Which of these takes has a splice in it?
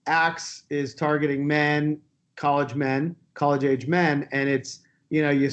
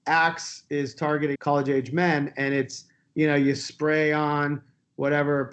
second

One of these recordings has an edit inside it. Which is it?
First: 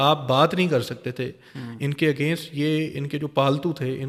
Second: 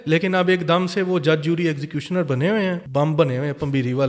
second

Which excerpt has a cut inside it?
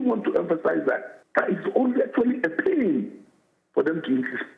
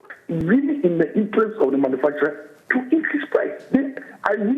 first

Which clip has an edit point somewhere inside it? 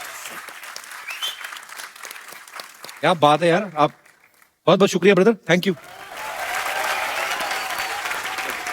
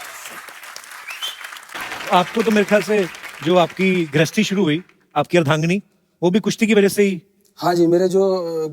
second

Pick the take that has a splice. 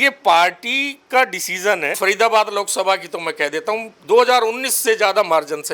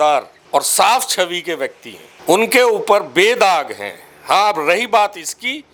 first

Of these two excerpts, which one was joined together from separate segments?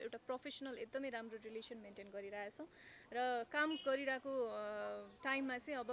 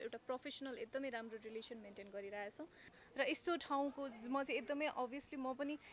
second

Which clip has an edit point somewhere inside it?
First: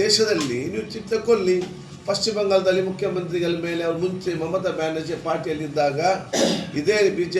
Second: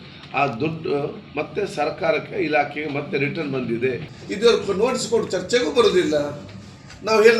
second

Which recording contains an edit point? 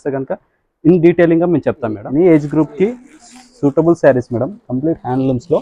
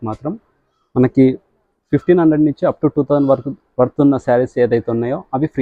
first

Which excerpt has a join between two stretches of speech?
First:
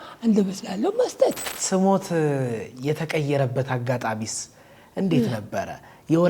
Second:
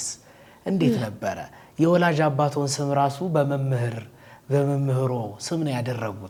first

